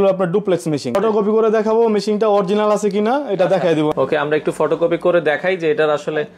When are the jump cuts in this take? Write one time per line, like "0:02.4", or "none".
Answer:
0:01.0
0:03.9

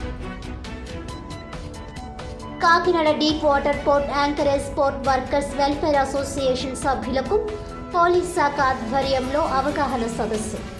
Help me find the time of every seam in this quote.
0:01.7

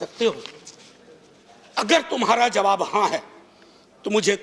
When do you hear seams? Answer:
none

